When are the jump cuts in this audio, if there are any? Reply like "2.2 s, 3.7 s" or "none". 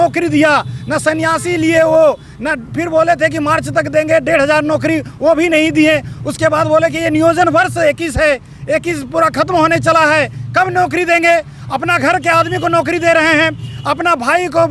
none